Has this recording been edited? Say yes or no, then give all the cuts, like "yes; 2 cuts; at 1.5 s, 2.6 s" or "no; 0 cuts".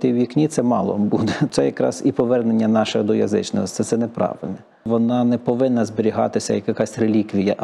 yes; 2 cuts; at 1.5 s, 4.8 s